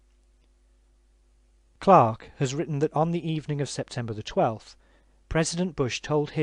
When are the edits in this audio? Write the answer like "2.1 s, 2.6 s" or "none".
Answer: 4.2 s